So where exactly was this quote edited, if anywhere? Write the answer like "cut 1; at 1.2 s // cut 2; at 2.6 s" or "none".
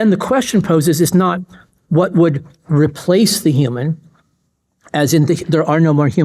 none